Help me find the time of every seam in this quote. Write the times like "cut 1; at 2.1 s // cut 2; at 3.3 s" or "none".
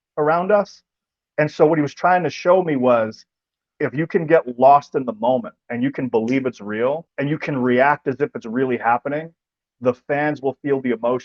cut 1; at 7.1 s